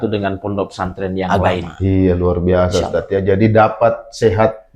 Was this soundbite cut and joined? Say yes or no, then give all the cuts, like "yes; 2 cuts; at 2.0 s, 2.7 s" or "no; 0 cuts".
yes; 1 cut; at 1.3 s